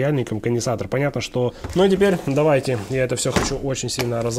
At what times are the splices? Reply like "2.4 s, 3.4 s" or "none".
1.6 s